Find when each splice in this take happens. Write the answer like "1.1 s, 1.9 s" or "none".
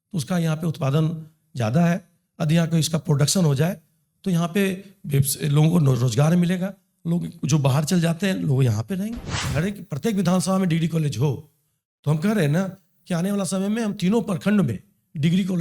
9.5 s